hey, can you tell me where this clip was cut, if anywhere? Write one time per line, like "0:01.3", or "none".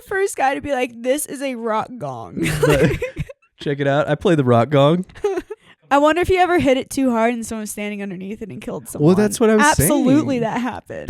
0:05.7